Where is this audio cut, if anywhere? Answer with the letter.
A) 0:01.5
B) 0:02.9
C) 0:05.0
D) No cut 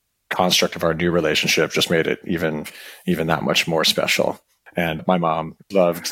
C